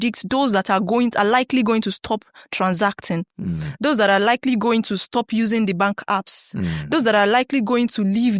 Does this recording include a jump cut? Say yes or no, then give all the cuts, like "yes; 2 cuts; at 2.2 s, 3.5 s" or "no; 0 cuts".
no; 0 cuts